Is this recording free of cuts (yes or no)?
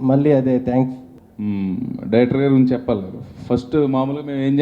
no